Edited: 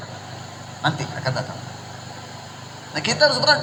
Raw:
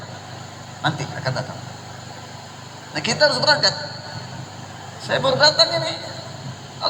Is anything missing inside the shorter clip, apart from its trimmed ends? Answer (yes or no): no